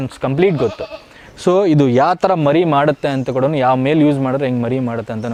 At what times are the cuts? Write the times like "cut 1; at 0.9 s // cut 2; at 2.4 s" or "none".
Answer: none